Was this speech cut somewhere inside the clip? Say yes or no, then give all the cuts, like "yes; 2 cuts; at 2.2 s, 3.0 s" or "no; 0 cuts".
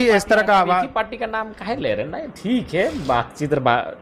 no; 0 cuts